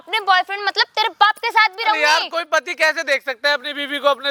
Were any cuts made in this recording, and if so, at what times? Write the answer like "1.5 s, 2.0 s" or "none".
none